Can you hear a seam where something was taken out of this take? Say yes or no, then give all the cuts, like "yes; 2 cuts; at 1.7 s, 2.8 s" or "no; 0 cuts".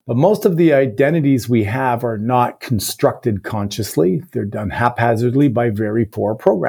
no; 0 cuts